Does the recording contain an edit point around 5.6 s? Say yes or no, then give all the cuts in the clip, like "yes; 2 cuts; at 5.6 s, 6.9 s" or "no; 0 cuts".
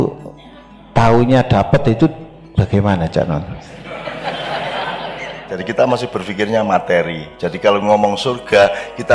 yes; 1 cut; at 5.6 s